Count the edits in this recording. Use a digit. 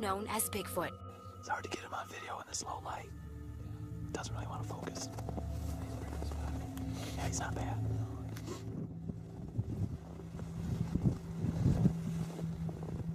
1